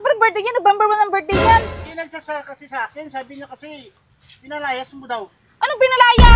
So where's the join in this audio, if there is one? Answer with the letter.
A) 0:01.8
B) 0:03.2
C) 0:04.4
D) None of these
A